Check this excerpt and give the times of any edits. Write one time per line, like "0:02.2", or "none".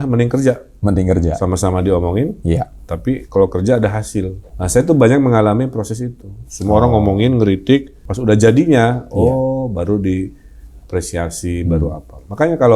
0:04.5
0:08.0